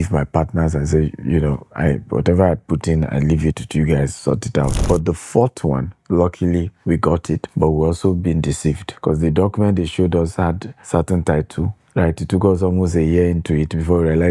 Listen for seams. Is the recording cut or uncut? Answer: cut